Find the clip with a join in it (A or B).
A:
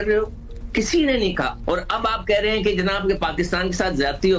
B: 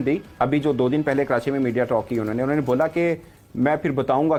A